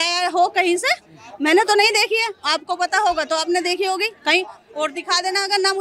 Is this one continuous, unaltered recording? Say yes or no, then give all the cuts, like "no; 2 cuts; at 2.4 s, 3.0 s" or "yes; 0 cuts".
yes; 0 cuts